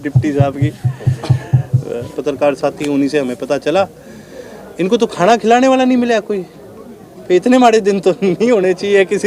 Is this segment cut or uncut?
cut